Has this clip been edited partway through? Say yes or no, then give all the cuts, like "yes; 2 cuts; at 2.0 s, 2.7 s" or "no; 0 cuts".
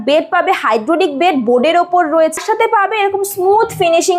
yes; 1 cut; at 2.4 s